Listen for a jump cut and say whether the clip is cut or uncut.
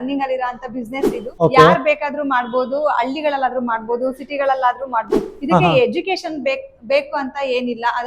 cut